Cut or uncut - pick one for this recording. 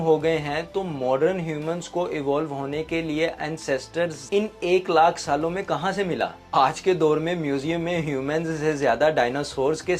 cut